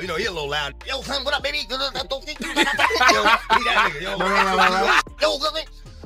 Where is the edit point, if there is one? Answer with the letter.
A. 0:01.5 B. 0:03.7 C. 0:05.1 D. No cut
D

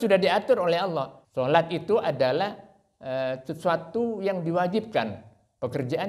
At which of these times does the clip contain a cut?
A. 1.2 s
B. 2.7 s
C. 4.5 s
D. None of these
A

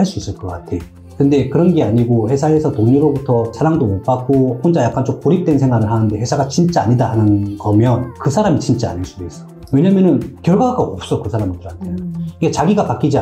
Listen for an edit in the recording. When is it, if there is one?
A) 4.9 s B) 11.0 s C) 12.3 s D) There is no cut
C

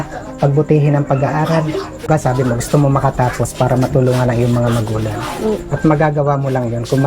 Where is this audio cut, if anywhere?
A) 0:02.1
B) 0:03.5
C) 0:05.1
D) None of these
A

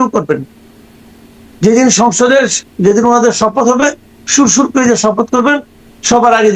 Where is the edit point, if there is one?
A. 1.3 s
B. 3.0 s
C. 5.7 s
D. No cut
D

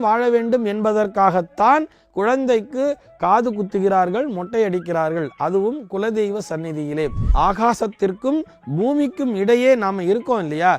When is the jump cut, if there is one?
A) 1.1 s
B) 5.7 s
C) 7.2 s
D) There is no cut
C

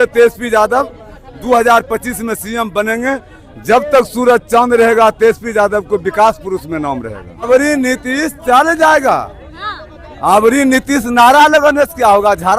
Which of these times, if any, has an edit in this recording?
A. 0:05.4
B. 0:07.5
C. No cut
B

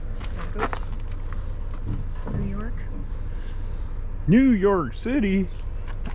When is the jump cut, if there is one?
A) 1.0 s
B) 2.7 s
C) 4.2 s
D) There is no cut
D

